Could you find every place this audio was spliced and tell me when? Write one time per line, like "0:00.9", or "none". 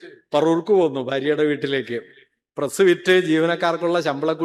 none

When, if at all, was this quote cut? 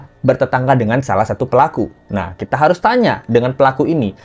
none

